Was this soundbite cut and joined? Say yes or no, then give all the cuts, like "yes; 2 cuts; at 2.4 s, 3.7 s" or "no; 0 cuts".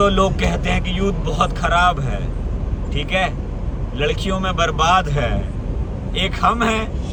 no; 0 cuts